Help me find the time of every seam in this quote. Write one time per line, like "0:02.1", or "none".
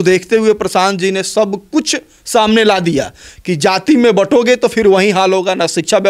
none